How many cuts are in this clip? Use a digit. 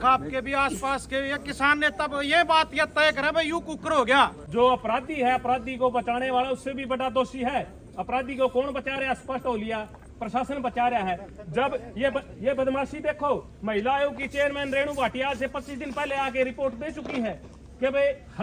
1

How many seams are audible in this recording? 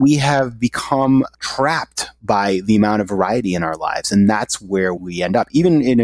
2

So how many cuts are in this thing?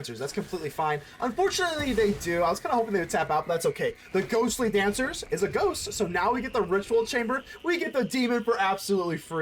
0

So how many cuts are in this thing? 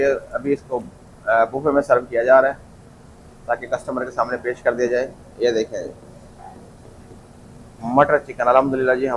0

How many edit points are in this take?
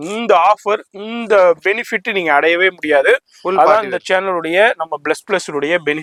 0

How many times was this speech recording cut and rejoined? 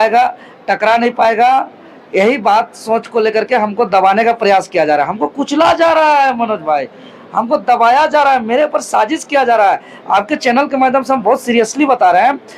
0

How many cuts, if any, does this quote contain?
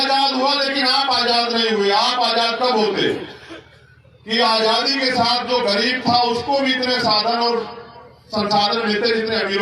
0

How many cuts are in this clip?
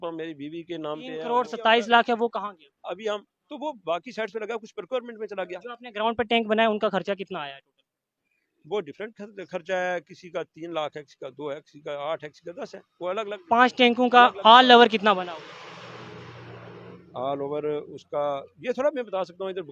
1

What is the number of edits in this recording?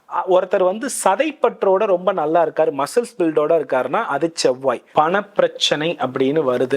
1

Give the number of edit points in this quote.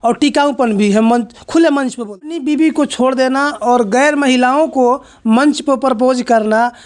1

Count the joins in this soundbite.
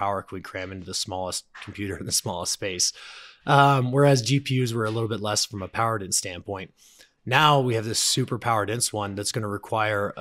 0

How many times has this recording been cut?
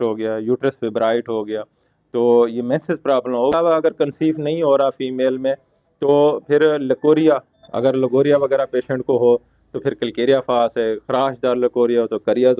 1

